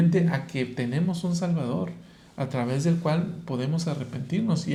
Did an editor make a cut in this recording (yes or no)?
no